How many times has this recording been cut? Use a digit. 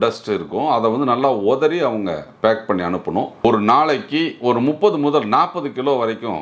1